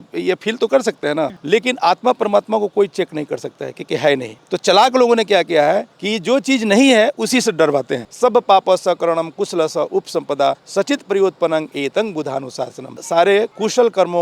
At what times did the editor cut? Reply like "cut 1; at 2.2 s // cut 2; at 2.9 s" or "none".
cut 1; at 1.4 s // cut 2; at 8.1 s